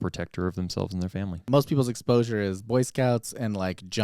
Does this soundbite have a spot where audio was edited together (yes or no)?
yes